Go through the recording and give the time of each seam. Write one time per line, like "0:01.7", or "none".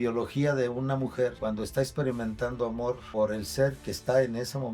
0:01.4
0:03.0